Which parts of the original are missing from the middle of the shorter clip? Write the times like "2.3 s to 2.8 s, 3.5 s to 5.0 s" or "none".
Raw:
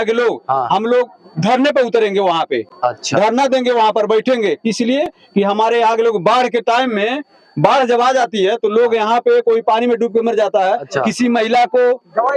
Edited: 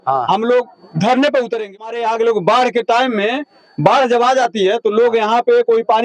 2.2 s to 5.6 s